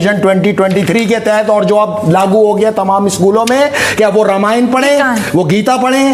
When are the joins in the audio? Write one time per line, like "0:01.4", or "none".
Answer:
none